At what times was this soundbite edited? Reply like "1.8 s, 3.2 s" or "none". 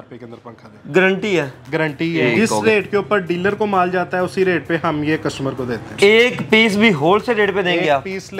2.2 s, 5.8 s